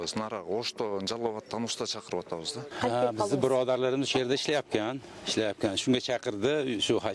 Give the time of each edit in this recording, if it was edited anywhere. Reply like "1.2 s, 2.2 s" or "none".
none